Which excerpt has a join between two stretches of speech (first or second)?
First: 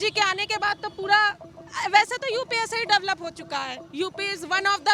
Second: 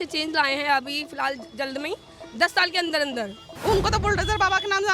second